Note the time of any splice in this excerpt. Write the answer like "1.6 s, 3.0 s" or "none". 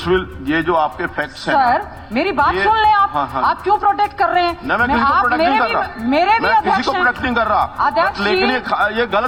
none